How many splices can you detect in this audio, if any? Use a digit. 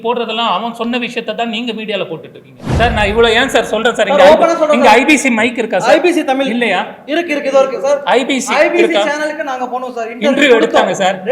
1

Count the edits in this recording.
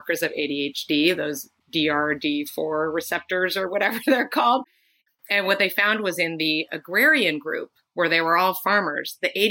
1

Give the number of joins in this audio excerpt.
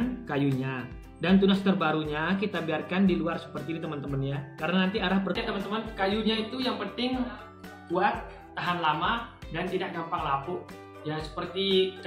1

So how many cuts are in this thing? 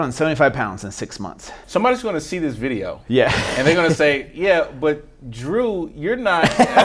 1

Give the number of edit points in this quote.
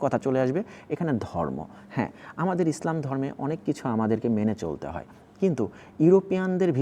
0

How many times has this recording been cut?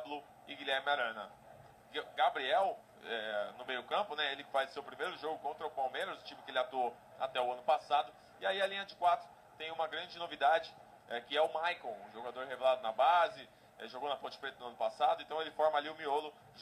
0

